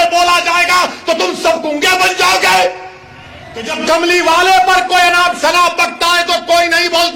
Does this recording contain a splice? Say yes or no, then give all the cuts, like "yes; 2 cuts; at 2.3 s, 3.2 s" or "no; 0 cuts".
yes; 1 cut; at 3.7 s